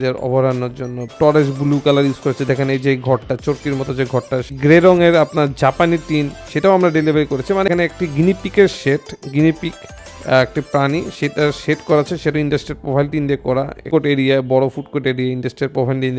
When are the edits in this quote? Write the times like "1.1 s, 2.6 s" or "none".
1.1 s, 4.5 s, 7.7 s, 13.8 s